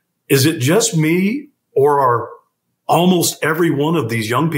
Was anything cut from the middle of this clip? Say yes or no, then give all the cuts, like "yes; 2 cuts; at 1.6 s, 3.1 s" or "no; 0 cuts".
no; 0 cuts